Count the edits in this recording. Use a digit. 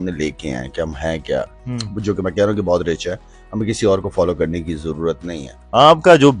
0